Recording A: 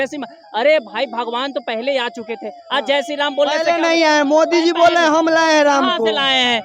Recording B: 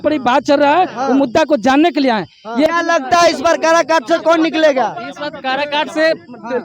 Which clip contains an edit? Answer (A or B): B